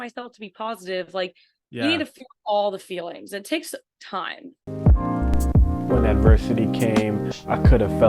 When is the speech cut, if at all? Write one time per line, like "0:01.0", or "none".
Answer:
0:04.6